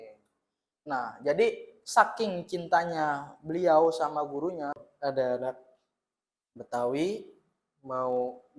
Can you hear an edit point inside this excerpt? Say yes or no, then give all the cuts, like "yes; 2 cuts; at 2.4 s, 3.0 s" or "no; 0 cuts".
yes; 1 cut; at 4.8 s